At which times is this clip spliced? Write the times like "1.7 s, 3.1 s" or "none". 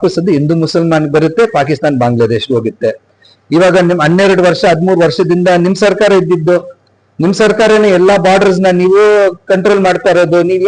none